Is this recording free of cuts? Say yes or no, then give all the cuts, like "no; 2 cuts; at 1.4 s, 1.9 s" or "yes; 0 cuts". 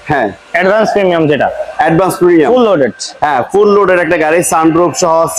yes; 0 cuts